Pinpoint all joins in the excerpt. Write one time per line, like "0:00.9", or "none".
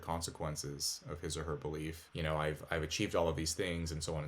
0:02.0

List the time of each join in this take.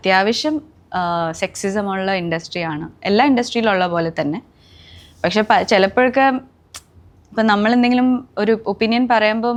none

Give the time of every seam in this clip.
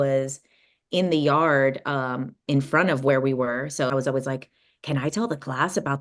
0:03.9

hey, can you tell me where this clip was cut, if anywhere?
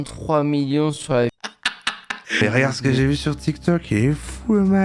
0:02.4

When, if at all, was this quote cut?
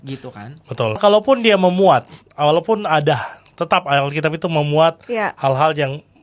0:01.0

